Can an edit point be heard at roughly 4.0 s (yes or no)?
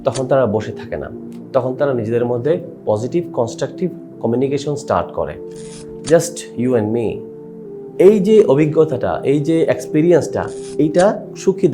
no